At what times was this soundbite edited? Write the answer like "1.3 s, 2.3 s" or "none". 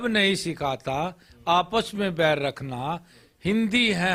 none